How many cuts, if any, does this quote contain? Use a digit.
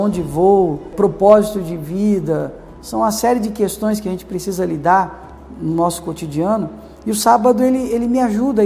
2